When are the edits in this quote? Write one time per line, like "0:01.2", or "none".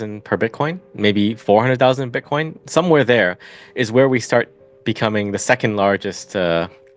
none